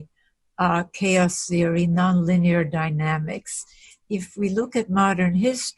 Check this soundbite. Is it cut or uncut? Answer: cut